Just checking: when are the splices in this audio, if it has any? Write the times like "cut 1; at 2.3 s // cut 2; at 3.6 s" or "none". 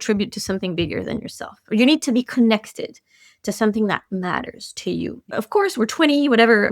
cut 1; at 5.3 s